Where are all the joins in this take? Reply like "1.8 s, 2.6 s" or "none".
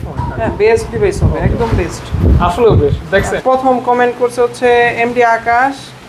3.3 s